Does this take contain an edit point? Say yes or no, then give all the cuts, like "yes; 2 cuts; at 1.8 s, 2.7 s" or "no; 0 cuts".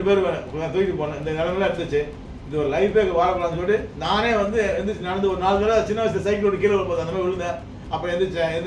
no; 0 cuts